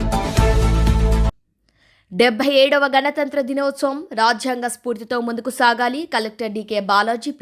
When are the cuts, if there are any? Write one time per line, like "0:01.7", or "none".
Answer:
0:01.5